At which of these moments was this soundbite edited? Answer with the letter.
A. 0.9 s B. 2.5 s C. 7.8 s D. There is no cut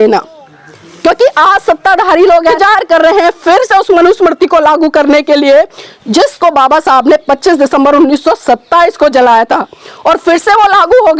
B